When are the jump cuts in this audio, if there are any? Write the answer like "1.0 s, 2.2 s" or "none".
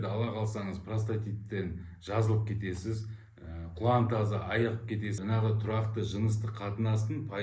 5.2 s